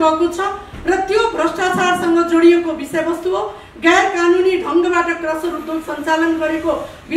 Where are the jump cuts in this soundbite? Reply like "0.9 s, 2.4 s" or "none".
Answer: none